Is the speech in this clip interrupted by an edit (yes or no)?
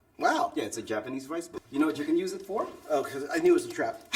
yes